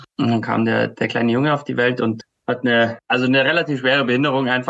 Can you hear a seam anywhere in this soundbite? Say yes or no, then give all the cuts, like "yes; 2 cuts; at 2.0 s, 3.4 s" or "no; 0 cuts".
no; 0 cuts